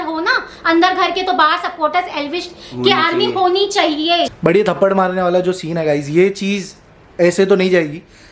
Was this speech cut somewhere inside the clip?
yes; 1 cut; at 4.3 s

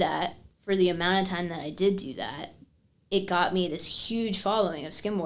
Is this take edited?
no; 0 cuts

